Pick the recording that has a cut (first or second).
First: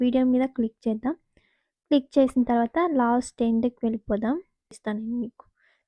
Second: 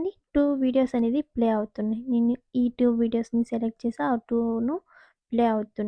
first